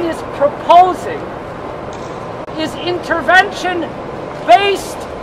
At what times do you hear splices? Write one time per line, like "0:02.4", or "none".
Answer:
none